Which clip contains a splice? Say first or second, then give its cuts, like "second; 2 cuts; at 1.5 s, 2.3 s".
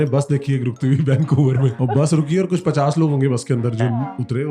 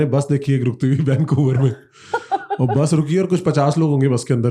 first; 1 cut; at 1.8 s